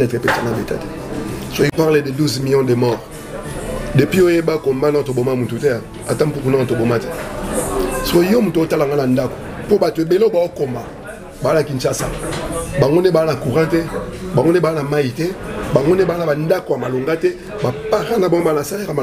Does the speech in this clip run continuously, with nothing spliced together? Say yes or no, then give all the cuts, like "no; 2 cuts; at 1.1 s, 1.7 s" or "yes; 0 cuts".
no; 1 cut; at 1.7 s